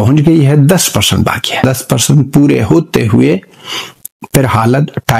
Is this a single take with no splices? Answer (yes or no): no